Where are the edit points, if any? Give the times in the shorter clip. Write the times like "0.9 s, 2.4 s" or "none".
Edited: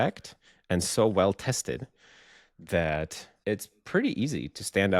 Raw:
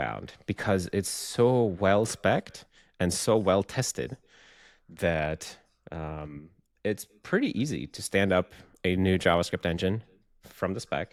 3.2 s

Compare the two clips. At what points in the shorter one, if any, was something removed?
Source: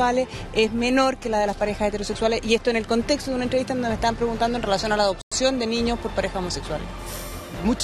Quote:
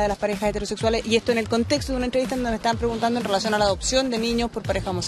3.8 s

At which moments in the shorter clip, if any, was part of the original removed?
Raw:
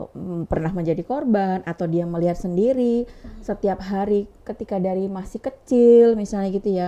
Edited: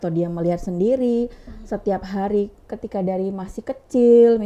none

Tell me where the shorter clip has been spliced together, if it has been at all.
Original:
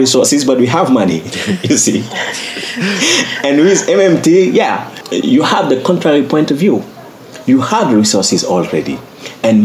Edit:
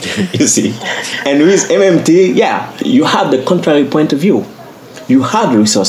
1.1 s, 2.7 s

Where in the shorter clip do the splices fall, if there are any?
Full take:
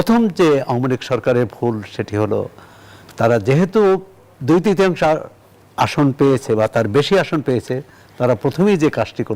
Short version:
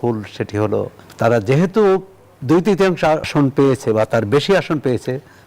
1.0 s, 3.3 s

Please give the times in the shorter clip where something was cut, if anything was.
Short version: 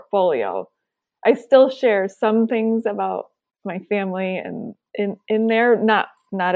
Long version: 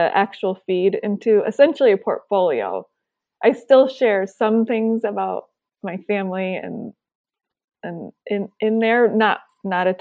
4.8 s

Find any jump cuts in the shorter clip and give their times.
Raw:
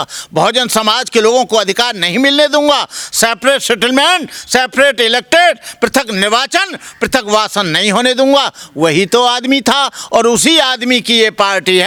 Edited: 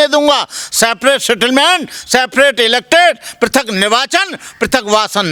none

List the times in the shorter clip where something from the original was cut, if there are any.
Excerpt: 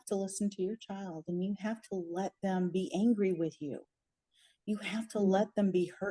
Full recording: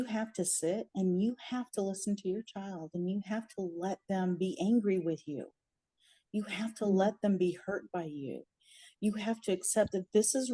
none

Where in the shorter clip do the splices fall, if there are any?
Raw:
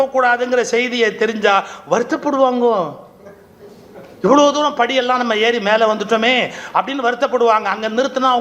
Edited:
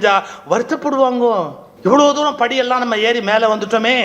1.6 s

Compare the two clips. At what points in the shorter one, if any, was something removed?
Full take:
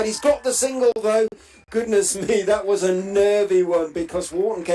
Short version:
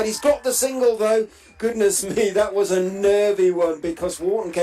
1.1 s

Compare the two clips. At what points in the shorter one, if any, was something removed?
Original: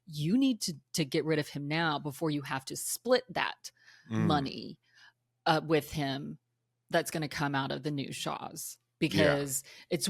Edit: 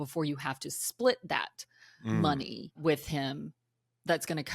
2.8 s

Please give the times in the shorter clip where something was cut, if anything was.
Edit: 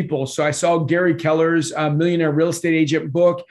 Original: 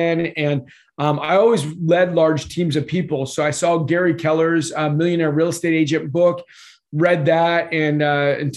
none

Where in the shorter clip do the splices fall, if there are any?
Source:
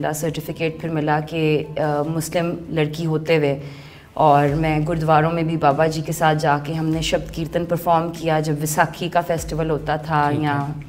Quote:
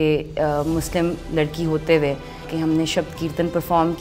2.5 s

